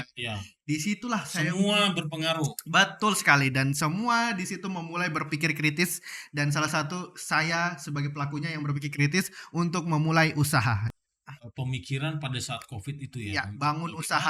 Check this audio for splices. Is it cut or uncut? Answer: cut